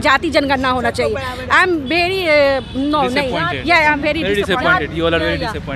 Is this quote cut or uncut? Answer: uncut